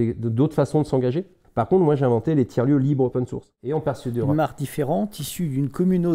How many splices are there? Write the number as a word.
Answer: two